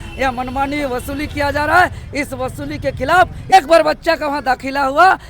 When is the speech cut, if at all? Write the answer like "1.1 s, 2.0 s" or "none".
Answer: 3.5 s

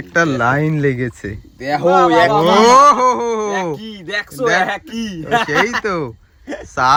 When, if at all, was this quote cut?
none

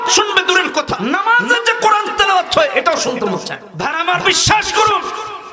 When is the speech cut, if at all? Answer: 0.9 s, 4.0 s

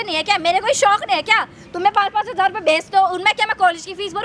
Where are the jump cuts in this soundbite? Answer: none

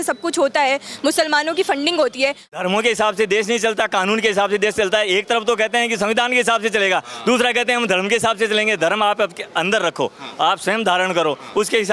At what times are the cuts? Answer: 2.5 s

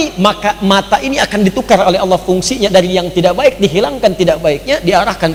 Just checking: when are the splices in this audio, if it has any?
none

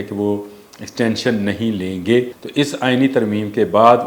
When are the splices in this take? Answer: 2.4 s

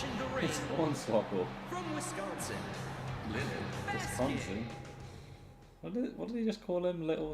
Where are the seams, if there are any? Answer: 3.5 s

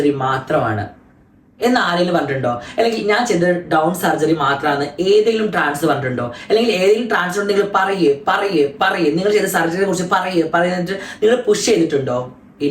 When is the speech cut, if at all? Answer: none

